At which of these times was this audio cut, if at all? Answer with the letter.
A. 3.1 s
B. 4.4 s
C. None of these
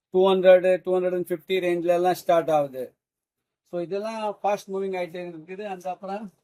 C